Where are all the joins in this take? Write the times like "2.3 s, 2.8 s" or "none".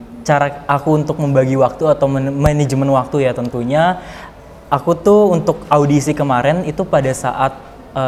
none